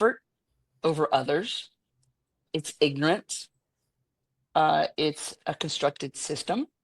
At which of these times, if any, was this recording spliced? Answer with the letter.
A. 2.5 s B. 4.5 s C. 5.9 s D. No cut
A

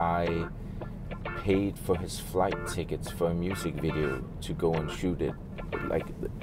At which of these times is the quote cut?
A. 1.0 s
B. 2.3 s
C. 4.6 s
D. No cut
D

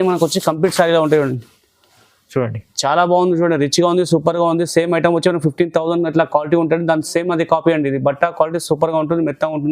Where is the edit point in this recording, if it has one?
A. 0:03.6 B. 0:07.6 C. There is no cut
C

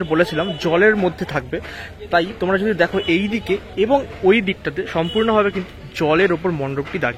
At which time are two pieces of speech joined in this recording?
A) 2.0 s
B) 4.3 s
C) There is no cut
C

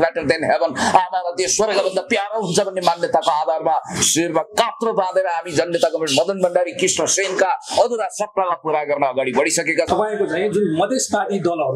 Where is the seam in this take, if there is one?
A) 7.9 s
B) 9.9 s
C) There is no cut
B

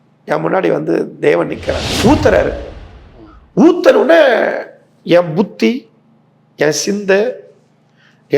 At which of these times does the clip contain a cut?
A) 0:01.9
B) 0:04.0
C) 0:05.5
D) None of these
A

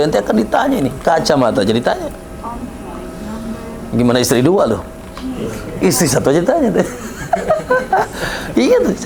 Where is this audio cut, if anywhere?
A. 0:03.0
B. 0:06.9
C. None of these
C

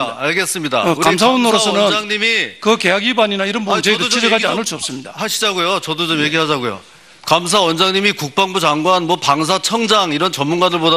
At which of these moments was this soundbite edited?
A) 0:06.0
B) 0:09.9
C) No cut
A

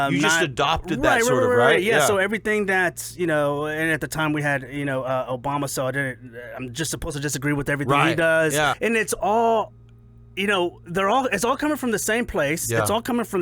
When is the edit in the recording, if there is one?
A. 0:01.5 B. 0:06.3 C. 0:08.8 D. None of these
C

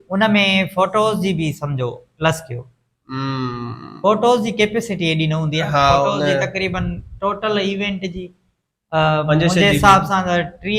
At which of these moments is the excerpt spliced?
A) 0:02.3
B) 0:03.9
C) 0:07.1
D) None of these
D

